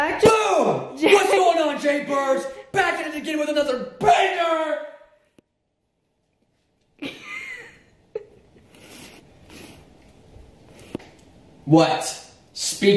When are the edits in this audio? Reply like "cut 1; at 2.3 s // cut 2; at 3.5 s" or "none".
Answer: none